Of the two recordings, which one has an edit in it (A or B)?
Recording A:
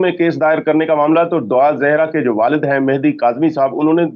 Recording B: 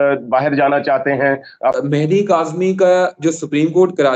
B